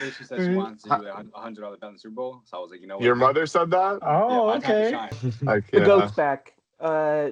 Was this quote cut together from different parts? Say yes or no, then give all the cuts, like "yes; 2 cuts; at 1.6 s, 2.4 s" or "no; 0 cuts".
yes; 1 cut; at 5.3 s